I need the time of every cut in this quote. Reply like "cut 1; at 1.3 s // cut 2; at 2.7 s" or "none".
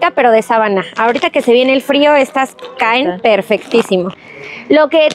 cut 1; at 4.2 s

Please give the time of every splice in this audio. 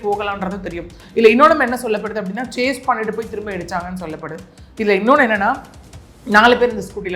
none

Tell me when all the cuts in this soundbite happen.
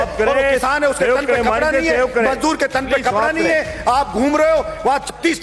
none

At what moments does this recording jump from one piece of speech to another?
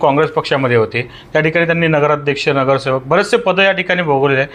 none

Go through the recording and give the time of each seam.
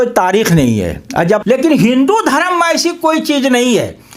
cut 1; at 1.4 s

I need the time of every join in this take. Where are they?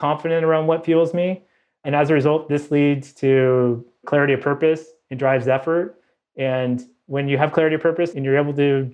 none

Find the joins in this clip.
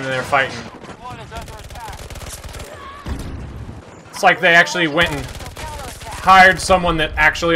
cut 1; at 1.0 s // cut 2; at 3.8 s

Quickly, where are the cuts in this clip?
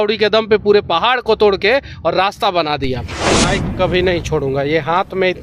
cut 1; at 3.3 s

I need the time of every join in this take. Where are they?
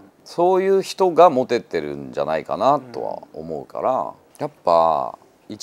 cut 1; at 4.2 s

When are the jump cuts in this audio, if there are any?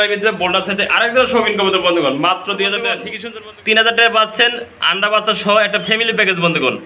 cut 1; at 3.1 s

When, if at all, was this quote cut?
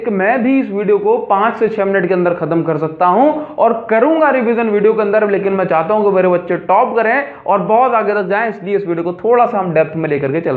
none

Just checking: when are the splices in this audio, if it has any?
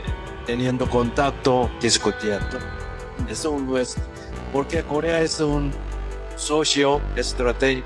none

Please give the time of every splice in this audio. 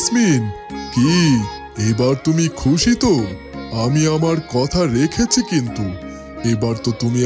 none

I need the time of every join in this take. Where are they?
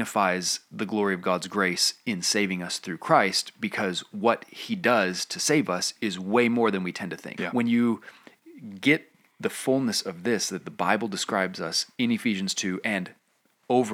cut 1; at 7.3 s

